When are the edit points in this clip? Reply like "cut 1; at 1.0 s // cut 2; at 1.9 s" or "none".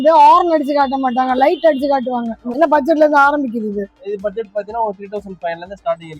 cut 1; at 2.4 s